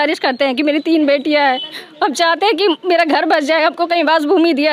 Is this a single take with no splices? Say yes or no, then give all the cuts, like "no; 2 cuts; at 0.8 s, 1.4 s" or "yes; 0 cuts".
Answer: yes; 0 cuts